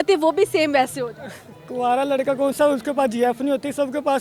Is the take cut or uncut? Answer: uncut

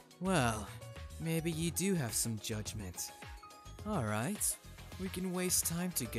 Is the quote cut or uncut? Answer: uncut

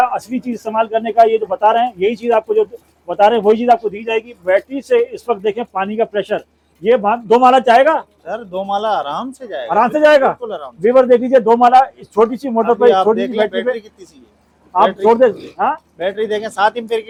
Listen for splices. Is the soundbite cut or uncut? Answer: uncut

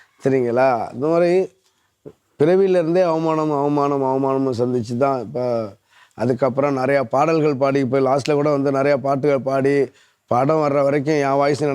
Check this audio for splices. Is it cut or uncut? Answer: uncut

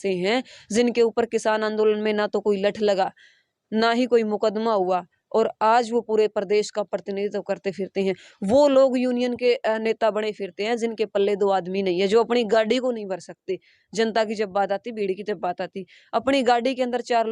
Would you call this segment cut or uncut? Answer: uncut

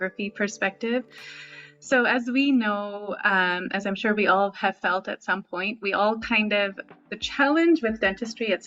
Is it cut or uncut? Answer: uncut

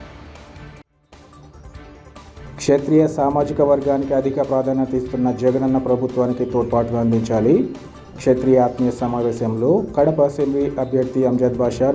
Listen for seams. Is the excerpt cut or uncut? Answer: uncut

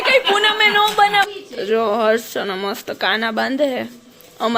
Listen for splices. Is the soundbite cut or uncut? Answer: cut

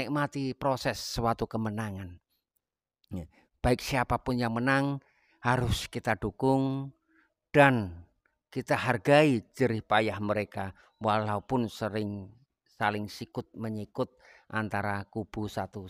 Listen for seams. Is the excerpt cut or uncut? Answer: uncut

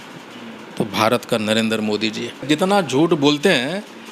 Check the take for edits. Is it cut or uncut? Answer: cut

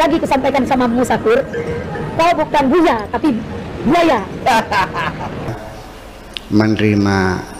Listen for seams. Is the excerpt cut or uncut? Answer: cut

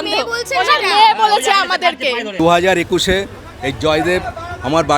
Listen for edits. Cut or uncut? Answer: cut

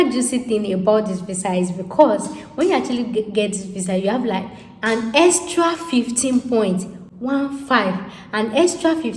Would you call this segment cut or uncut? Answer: uncut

